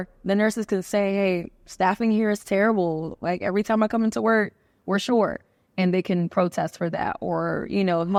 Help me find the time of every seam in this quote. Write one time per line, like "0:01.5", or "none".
none